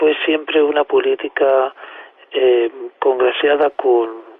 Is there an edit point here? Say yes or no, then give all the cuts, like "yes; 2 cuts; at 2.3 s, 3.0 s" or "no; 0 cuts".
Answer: yes; 1 cut; at 2.1 s